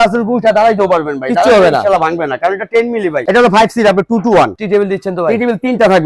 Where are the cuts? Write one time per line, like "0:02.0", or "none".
0:03.2
0:04.6